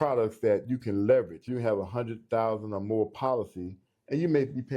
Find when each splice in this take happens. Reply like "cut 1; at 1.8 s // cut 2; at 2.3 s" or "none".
cut 1; at 1.5 s